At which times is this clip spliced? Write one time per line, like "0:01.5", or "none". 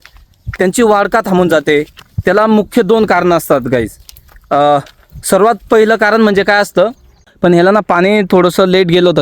0:07.2